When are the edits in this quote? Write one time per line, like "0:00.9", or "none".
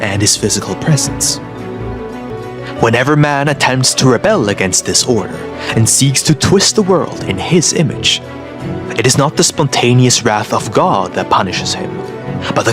0:02.3

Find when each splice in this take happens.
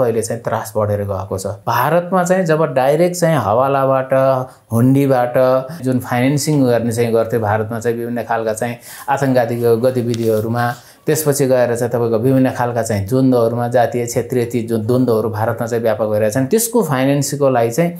0:01.5
0:05.8
0:16.5

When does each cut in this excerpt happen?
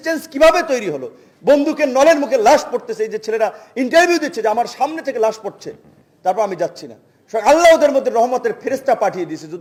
none

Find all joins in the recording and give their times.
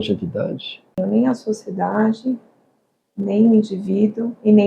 0:01.0

